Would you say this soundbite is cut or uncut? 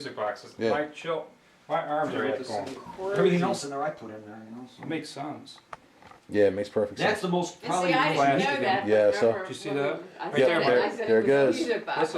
cut